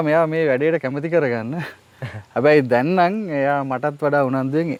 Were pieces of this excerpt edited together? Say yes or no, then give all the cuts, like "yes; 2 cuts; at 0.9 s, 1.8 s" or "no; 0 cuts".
no; 0 cuts